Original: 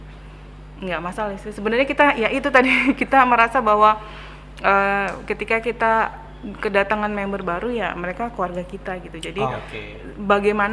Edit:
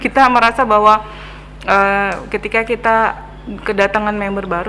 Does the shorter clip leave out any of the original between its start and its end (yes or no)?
no